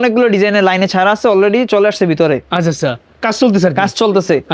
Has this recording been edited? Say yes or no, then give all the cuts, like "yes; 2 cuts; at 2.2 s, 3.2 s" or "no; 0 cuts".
no; 0 cuts